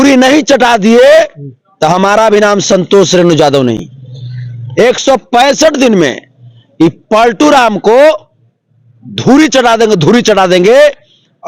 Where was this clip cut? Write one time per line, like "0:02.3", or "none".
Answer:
none